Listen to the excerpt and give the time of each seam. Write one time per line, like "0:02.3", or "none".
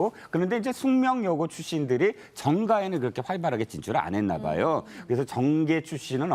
none

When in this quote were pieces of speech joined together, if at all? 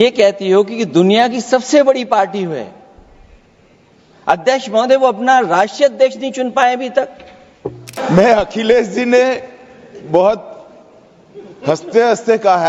0:07.9

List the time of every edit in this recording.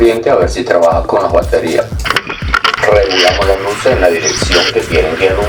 0:02.7

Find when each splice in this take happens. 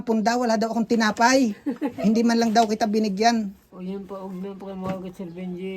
0:03.6

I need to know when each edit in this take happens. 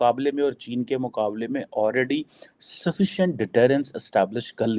none

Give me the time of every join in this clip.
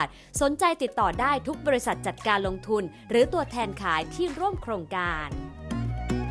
0:05.1

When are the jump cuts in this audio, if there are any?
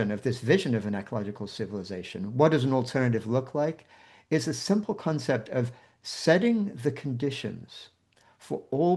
none

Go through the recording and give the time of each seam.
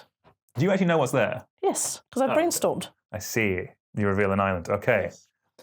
0:03.8

